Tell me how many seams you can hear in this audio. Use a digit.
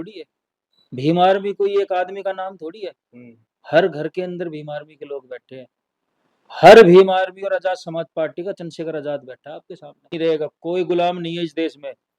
1